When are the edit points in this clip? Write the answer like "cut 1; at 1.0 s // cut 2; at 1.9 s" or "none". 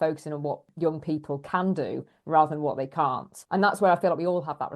cut 1; at 3.3 s